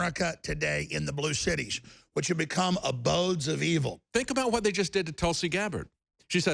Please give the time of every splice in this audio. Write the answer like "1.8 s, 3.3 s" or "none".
4.0 s